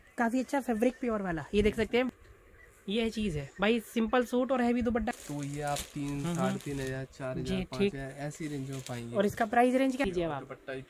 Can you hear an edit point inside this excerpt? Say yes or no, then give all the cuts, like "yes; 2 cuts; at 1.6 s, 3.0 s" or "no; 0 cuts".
yes; 3 cuts; at 2.1 s, 5.1 s, 10.0 s